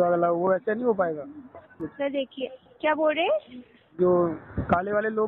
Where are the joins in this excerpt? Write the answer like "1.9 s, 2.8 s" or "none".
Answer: 1.9 s